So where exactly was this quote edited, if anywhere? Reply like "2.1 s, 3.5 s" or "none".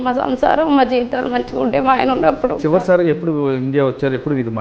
2.6 s